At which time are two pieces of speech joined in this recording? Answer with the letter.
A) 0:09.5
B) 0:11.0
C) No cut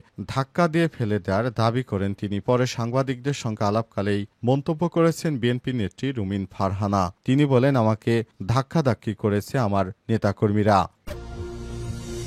B